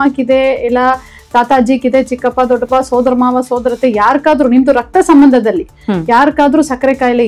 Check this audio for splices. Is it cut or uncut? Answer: uncut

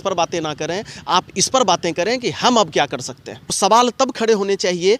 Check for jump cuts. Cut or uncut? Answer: cut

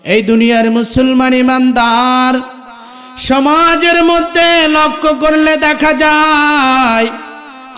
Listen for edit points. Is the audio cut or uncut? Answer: uncut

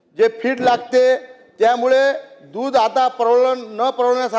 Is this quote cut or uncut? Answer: uncut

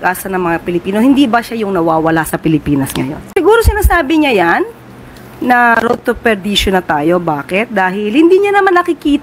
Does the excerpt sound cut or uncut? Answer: cut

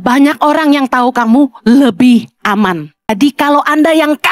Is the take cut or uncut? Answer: cut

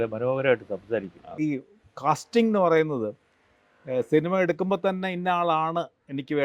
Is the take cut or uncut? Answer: cut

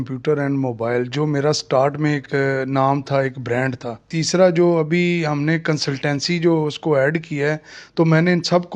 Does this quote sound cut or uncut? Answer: cut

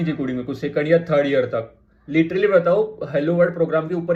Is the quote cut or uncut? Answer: uncut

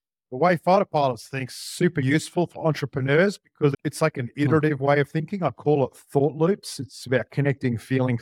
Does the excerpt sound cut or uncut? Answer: cut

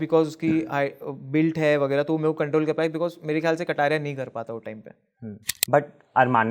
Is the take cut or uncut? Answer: cut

